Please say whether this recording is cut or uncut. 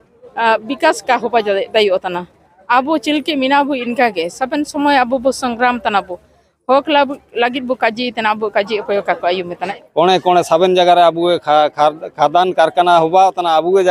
cut